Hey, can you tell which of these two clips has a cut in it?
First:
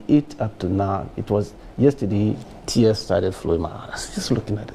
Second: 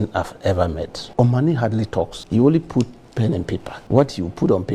second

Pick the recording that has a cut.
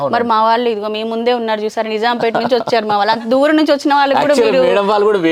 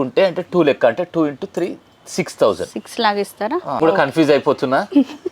second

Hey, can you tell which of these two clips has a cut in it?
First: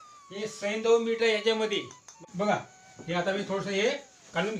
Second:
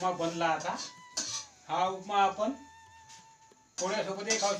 first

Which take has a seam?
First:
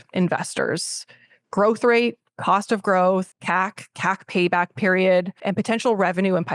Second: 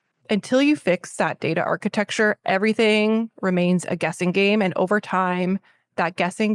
first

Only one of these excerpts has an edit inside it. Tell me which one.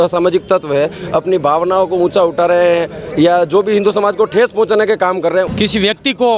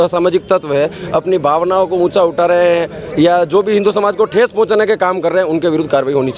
first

